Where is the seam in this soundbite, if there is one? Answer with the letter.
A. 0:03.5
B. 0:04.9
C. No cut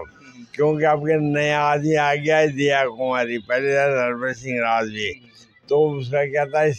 C